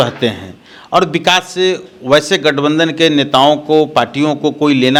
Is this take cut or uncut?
uncut